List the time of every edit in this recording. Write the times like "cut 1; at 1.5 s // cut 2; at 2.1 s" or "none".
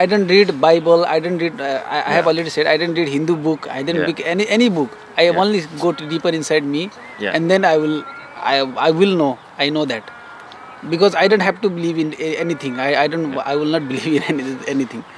none